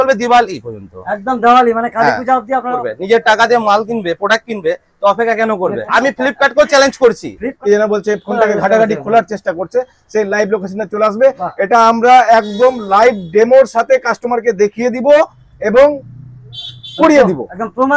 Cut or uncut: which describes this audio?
cut